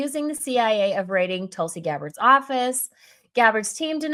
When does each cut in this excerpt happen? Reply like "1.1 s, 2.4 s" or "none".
none